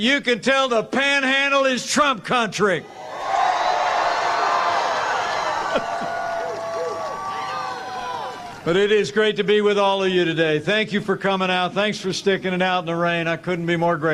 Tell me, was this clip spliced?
yes; 1 cut; at 8.5 s

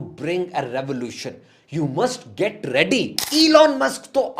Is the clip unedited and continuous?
no; 1 cut; at 3.2 s

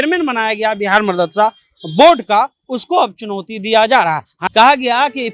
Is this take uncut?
no; 1 cut; at 4.3 s

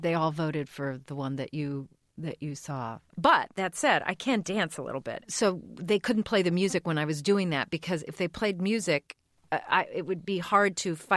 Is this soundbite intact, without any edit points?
no; 3 cuts; at 3.0 s, 5.2 s, 9.3 s

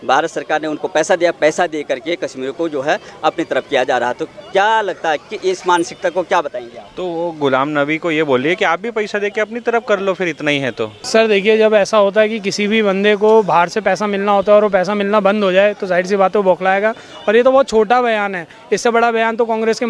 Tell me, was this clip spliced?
yes; 1 cut; at 11.0 s

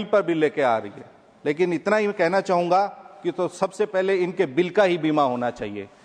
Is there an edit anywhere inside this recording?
no; 0 cuts

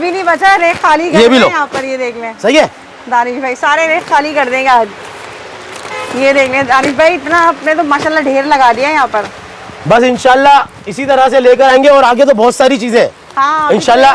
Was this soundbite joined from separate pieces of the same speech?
no; 0 cuts

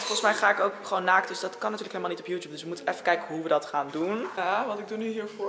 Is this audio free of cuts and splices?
no; 1 cut; at 4.4 s

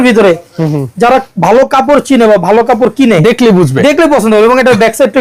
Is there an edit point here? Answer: no; 0 cuts

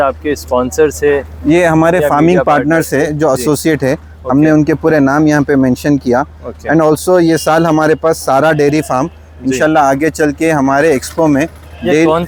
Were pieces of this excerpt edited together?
no; 0 cuts

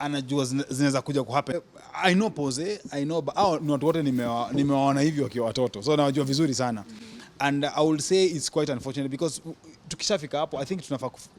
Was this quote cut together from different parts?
yes; 1 cut; at 1.5 s

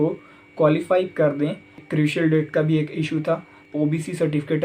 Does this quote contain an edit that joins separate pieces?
yes; 2 cuts; at 1.8 s, 3.6 s

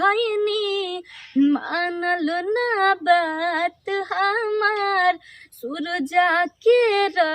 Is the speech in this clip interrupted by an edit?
no; 0 cuts

